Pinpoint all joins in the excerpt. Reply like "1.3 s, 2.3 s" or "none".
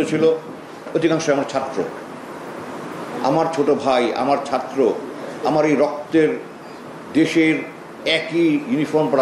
none